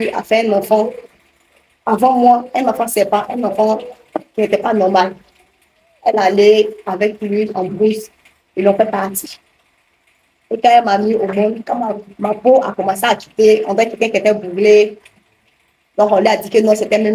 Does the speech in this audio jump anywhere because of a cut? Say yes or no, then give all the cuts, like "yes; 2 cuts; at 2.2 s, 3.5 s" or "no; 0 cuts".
no; 0 cuts